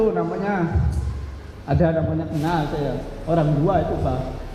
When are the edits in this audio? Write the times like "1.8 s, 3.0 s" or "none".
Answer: none